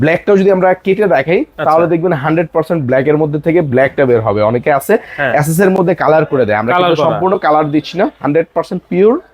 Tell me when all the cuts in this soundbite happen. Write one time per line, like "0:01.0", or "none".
none

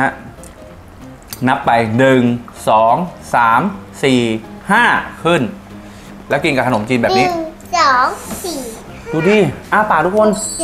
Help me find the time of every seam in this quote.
none

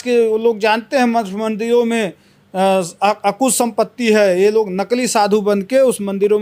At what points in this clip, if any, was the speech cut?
none

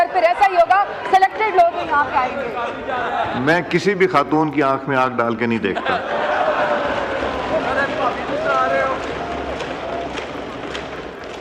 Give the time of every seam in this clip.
none

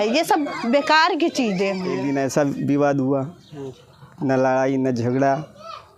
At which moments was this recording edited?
0:01.9

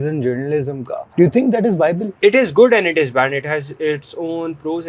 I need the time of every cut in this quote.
0:01.0
0:02.1

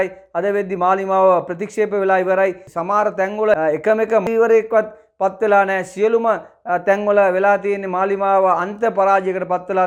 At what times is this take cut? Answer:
none

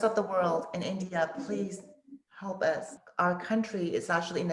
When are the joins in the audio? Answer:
0:03.0

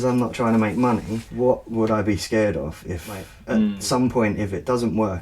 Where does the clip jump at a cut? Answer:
0:01.2
0:03.4

